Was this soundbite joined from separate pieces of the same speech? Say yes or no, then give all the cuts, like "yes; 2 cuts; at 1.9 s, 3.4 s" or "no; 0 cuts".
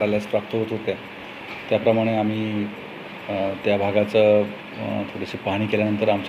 no; 0 cuts